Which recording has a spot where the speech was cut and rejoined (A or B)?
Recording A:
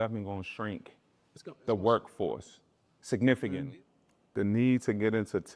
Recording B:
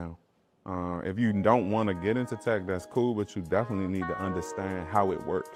A